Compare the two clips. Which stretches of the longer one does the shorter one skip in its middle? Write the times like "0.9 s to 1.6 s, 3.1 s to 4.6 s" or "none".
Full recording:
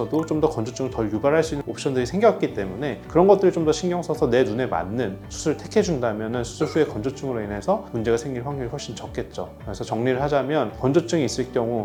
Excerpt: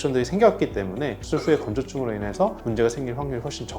3.0 s to 6.5 s